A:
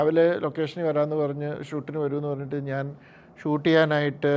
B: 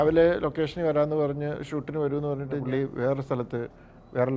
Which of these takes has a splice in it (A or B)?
B